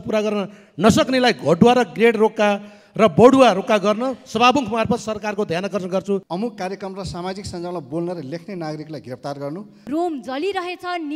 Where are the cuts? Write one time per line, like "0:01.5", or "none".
0:06.2
0:09.7